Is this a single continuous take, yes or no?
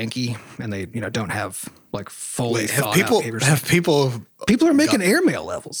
yes